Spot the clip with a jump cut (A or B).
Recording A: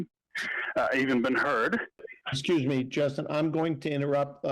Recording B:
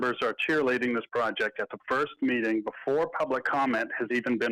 A